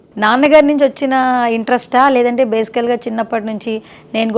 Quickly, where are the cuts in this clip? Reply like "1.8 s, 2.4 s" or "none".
none